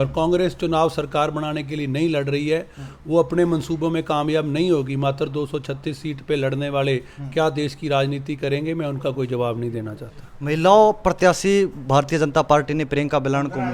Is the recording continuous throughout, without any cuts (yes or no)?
yes